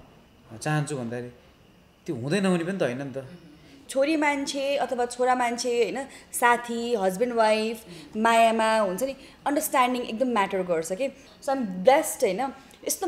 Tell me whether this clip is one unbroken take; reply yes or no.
no